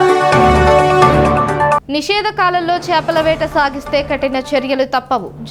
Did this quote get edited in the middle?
no; 0 cuts

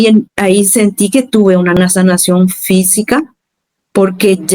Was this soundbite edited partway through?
yes; 1 cut; at 1.8 s

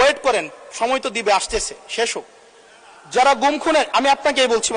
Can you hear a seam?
no; 0 cuts

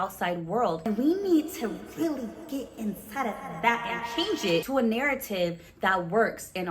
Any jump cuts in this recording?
yes; 2 cuts; at 0.9 s, 4.7 s

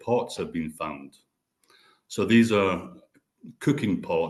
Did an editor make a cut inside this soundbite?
no; 0 cuts

